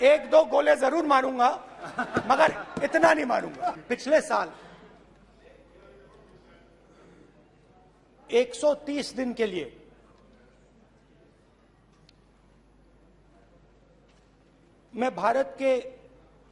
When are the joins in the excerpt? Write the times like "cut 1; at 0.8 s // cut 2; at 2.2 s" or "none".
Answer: none